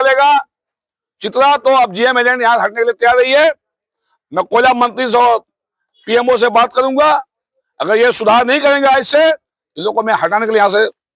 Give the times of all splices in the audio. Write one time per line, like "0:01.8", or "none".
none